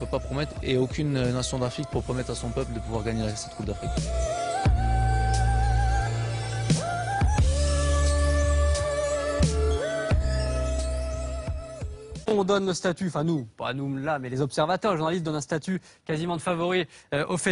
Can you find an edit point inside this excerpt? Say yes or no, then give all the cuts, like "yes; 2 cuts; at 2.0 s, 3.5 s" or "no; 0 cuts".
yes; 1 cut; at 12.3 s